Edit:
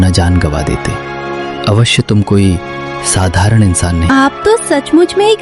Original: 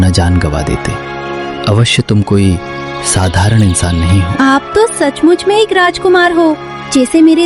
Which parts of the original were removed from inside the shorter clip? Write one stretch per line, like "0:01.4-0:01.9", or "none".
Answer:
0:04.1-0:04.4